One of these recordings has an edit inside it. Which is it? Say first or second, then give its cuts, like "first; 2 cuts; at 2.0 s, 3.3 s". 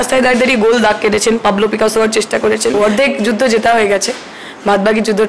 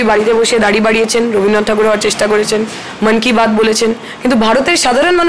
first; 1 cut; at 2.8 s